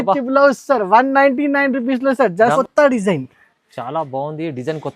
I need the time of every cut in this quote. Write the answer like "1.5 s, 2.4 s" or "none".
2.5 s